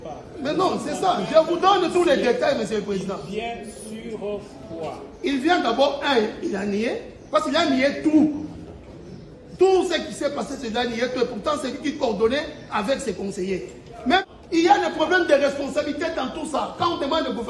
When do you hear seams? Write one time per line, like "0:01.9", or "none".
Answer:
0:14.2